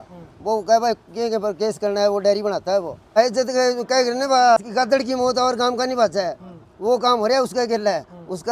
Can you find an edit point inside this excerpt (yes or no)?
yes